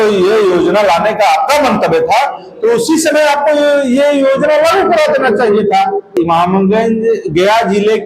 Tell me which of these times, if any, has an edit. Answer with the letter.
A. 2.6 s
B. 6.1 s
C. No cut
B